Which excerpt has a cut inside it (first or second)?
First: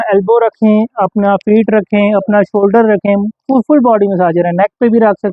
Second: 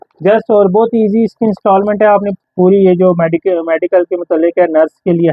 second